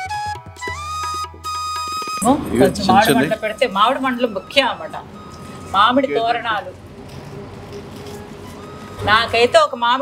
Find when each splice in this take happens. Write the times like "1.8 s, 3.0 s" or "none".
none